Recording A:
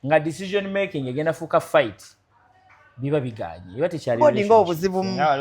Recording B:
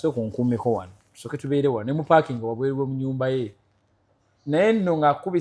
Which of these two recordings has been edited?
A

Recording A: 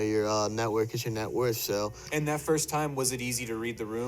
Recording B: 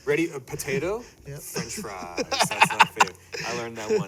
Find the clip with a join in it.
A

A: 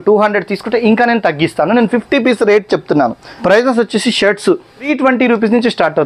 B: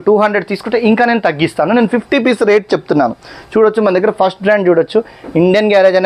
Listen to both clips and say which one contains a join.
A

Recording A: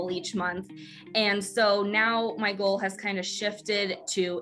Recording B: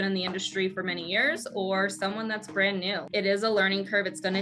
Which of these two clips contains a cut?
B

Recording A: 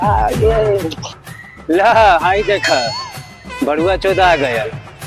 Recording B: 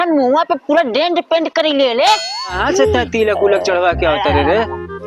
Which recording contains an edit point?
B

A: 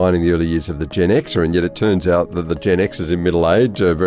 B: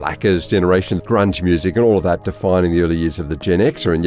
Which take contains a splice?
B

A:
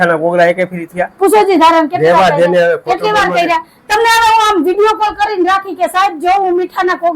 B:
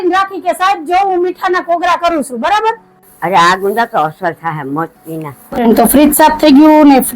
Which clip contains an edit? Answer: B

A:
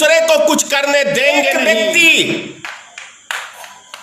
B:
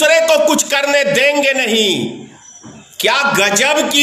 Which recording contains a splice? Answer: A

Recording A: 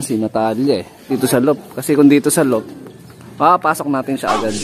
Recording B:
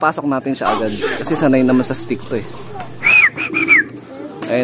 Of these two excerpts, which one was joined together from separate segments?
A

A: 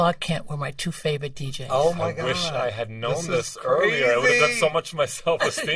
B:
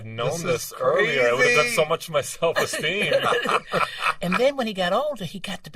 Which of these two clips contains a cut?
B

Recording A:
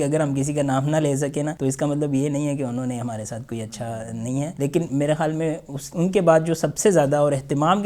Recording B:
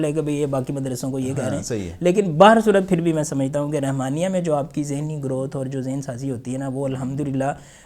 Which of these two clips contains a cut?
A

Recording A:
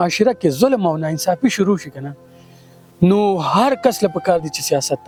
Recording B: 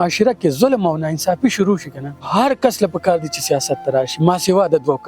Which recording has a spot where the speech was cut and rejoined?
B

